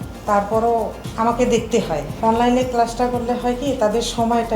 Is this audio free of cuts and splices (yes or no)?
no